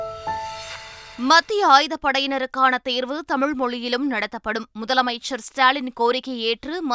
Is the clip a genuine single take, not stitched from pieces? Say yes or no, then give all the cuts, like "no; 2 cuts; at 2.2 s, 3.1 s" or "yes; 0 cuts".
no; 1 cut; at 1.0 s